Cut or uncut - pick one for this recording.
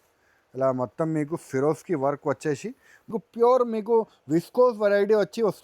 cut